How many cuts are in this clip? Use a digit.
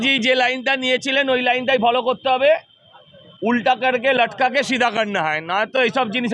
0